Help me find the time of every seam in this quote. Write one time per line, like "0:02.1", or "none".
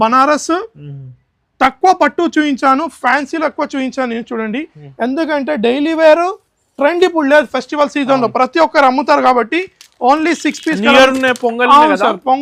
none